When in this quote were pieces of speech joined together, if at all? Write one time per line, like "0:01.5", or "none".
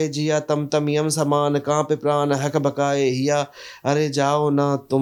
none